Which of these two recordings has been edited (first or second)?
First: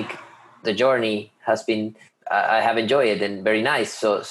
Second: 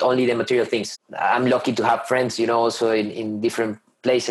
second